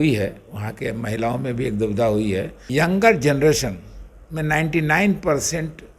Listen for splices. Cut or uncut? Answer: cut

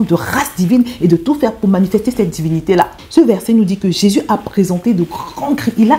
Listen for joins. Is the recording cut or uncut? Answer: cut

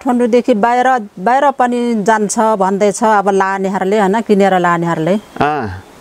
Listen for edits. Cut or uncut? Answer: uncut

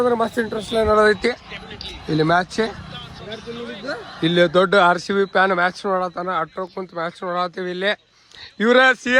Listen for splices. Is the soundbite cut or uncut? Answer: uncut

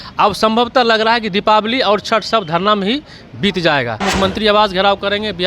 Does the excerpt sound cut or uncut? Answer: cut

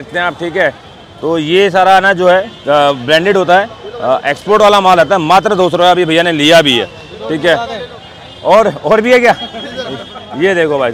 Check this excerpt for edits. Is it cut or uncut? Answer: uncut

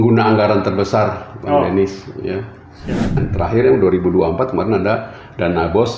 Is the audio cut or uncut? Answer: cut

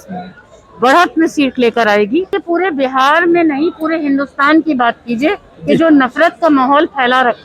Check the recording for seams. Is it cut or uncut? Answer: cut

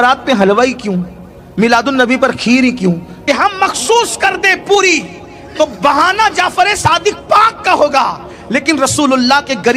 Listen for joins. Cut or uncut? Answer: cut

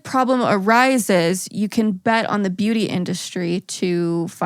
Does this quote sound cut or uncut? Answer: uncut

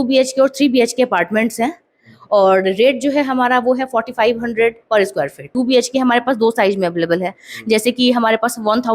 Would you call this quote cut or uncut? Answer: cut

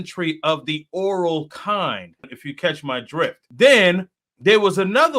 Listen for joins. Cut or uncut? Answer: cut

